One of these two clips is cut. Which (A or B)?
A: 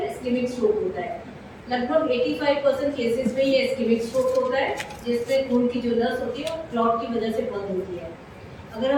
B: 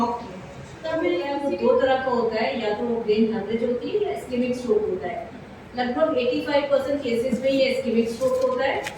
B